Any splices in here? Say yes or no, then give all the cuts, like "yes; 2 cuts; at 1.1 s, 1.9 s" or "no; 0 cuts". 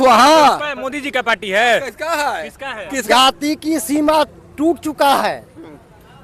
yes; 1 cut; at 3.0 s